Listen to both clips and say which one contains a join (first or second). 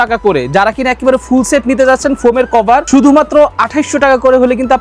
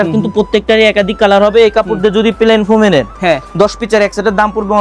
first